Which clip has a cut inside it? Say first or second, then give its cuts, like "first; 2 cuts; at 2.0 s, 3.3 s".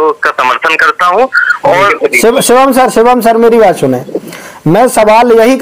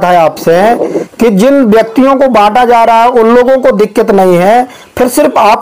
first; 1 cut; at 1.9 s